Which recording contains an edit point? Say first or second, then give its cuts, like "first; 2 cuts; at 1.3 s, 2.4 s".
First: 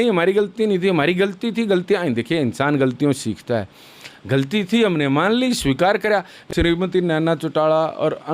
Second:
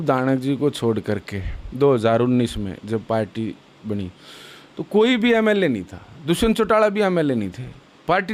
first; 1 cut; at 6.4 s